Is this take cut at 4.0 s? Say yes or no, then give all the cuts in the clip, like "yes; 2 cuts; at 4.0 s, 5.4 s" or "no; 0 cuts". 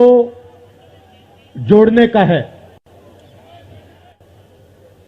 yes; 1 cut; at 4.0 s